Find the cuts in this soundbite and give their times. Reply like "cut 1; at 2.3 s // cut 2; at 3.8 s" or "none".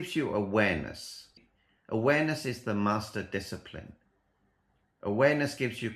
cut 1; at 1.3 s